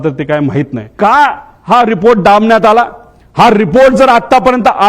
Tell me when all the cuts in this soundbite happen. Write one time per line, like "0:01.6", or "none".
0:00.9